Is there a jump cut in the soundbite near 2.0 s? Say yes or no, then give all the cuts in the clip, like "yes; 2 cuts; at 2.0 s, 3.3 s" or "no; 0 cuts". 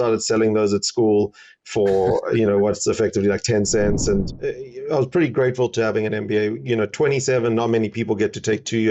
no; 1 cut; at 4.3 s